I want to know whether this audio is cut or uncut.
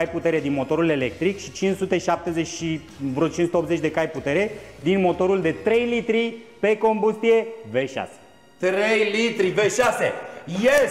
uncut